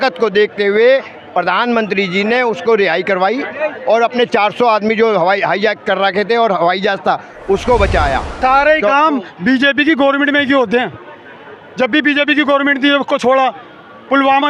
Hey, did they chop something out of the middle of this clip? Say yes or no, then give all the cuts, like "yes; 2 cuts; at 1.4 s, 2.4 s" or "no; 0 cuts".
yes; 1 cut; at 8.4 s